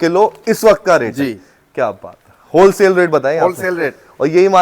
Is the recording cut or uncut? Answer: uncut